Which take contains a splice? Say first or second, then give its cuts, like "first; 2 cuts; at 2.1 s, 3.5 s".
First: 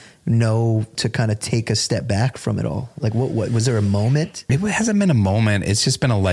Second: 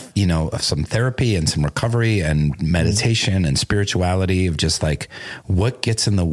first; 2 cuts; at 1.0 s, 4.4 s